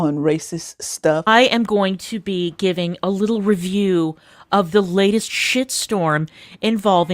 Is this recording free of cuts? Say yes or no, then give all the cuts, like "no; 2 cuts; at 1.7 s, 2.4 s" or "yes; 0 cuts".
no; 1 cut; at 1.2 s